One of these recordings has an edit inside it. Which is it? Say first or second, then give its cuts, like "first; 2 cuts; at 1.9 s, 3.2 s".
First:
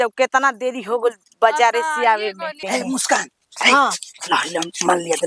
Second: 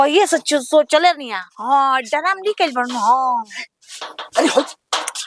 first; 1 cut; at 2.6 s